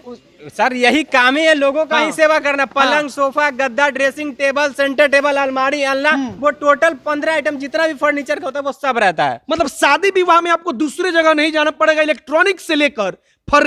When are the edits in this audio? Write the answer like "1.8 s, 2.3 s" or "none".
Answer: none